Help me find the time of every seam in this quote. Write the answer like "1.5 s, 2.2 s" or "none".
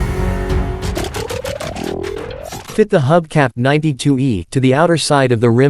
none

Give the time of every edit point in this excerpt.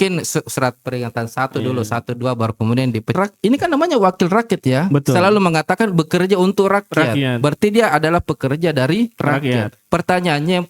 3.1 s

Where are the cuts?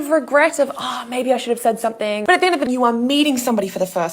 2.6 s

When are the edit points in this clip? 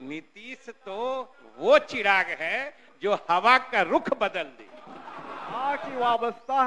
5.6 s

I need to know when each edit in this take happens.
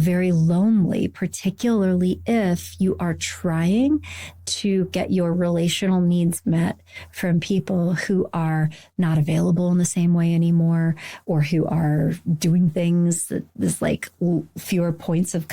none

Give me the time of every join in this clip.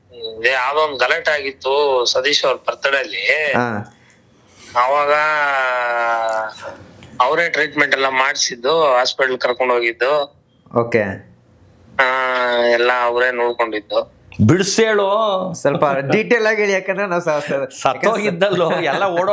none

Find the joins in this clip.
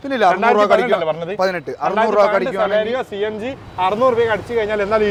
none

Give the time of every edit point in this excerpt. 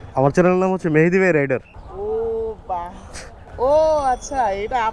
3.4 s

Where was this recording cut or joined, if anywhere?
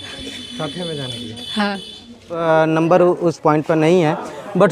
2.4 s

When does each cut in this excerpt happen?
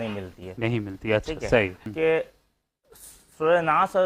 1.9 s

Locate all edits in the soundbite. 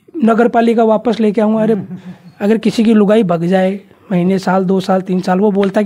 1.8 s

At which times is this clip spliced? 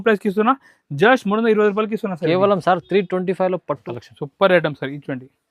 3.8 s

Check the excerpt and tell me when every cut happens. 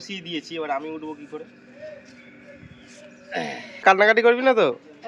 3.8 s

